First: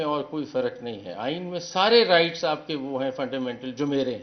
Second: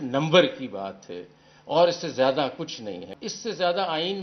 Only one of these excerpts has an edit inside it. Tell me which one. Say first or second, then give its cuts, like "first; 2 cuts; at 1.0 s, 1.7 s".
second; 1 cut; at 3.1 s